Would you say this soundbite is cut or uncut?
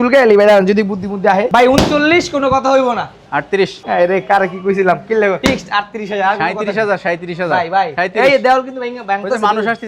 cut